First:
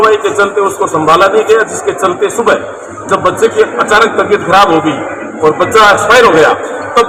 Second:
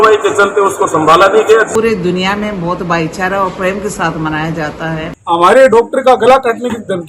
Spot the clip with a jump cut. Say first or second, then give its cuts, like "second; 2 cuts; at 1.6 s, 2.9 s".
second; 2 cuts; at 1.7 s, 5.2 s